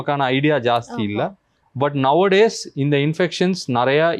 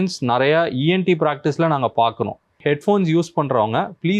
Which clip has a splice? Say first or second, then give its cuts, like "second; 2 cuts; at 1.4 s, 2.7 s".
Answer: second; 1 cut; at 2.6 s